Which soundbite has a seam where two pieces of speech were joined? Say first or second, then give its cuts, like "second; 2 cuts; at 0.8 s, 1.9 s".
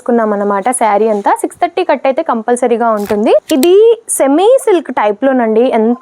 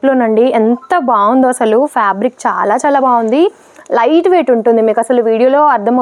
first; 1 cut; at 3.5 s